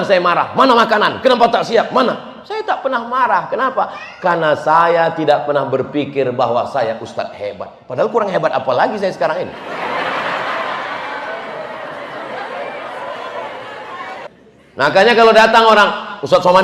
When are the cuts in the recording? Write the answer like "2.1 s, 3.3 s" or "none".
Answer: 14.3 s